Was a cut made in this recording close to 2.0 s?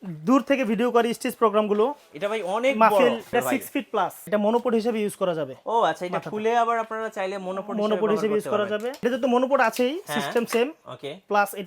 no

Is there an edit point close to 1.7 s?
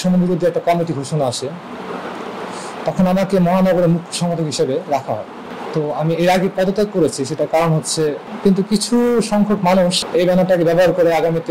no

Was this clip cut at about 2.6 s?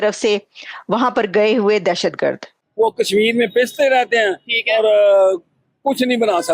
yes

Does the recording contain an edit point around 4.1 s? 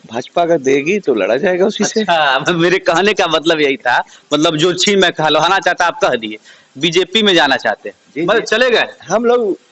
no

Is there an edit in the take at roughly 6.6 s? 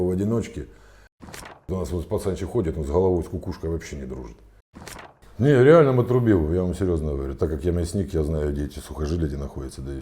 no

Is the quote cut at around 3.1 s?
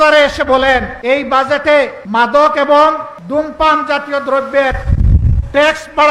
yes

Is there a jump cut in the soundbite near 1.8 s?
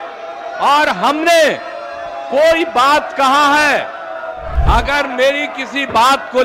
no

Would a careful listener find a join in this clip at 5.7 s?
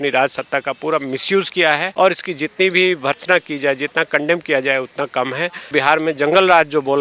yes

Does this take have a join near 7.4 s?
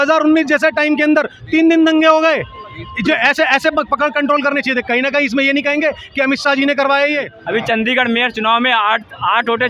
yes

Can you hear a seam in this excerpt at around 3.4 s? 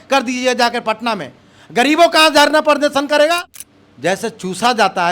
yes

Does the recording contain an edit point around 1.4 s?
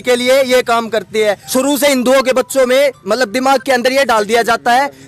yes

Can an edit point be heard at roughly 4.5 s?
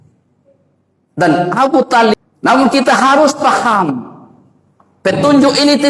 no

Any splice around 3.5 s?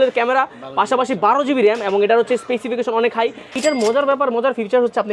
yes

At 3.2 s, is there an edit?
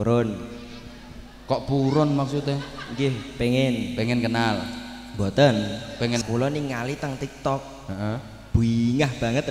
no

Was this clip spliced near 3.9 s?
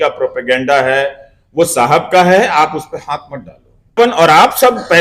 yes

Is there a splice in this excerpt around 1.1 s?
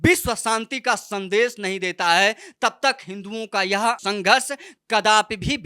no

